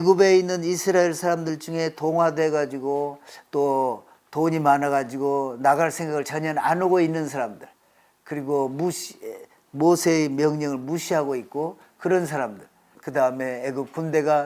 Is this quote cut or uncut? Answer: cut